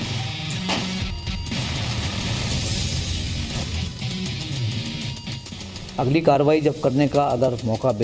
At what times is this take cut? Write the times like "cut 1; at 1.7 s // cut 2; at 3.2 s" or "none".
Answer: none